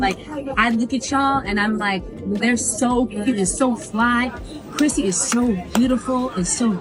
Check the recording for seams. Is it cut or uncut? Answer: uncut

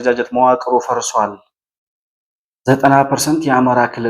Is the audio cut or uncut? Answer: uncut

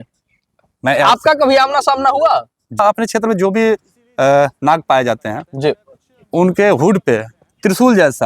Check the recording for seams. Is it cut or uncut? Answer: cut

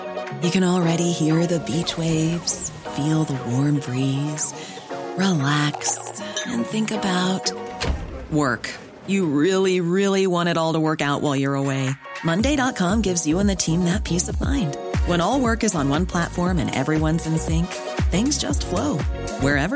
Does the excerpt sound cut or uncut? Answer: uncut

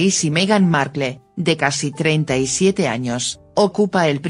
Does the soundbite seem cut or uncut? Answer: cut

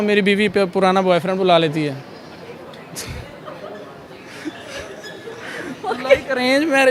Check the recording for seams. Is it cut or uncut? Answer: uncut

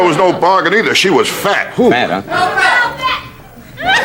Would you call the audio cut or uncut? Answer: uncut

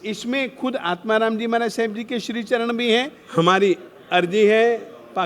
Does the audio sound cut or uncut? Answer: cut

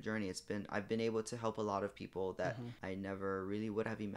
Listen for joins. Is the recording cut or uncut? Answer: cut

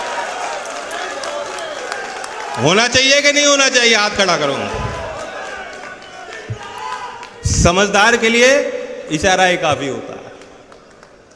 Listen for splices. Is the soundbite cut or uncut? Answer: uncut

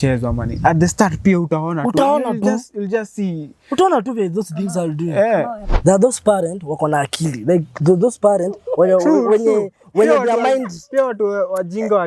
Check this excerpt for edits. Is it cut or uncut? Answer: cut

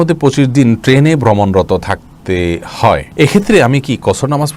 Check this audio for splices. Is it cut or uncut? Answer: cut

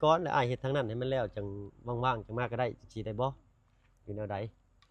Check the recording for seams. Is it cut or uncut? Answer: uncut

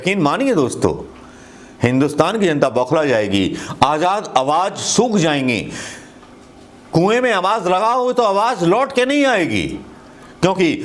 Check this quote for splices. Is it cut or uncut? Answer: uncut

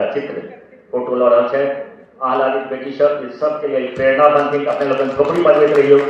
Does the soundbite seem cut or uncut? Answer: uncut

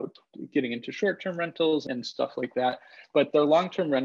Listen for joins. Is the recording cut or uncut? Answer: cut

